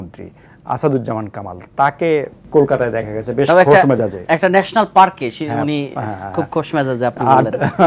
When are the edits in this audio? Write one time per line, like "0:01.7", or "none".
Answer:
none